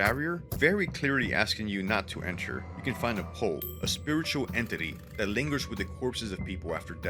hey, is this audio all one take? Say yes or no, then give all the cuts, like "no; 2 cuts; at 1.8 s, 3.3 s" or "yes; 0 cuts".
yes; 0 cuts